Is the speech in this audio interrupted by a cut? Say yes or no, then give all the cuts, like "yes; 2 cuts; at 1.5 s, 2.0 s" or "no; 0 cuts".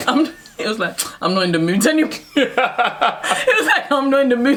no; 0 cuts